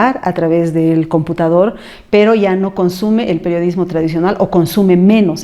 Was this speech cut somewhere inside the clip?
no; 0 cuts

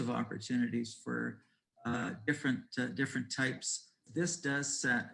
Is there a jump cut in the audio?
yes; 1 cut; at 4.0 s

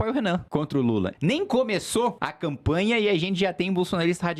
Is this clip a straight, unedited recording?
no; 2 cuts; at 1.0 s, 2.3 s

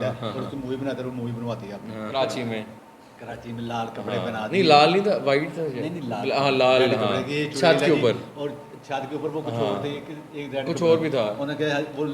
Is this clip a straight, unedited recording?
no; 1 cut; at 2.1 s

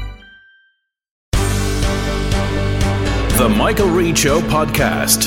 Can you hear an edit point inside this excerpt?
yes; 1 cut; at 1.2 s

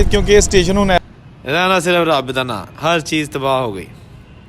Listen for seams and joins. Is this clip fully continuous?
no; 1 cut; at 1.0 s

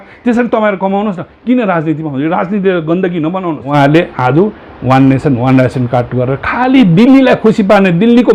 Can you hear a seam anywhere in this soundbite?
yes; 1 cut; at 3.6 s

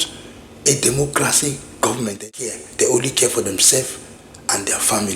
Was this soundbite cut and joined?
yes; 1 cut; at 2.2 s

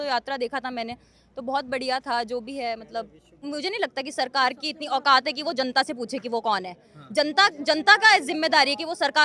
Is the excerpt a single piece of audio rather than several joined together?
no; 1 cut; at 3.4 s

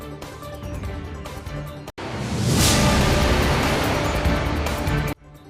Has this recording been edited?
yes; 1 cut; at 1.3 s

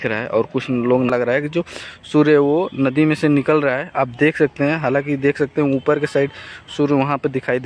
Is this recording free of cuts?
no; 1 cut; at 1.1 s

